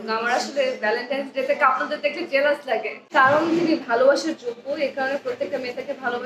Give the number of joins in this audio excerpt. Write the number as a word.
one